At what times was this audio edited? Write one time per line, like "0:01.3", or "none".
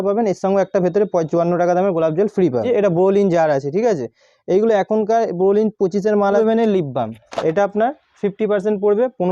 0:02.6
0:06.4